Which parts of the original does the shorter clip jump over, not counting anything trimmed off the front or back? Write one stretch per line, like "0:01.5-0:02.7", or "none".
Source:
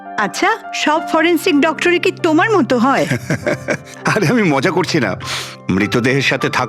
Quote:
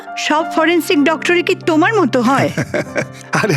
0:03.1-0:03.3